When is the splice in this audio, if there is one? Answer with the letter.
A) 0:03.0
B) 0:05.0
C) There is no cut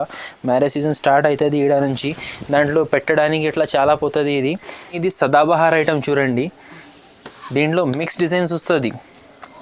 B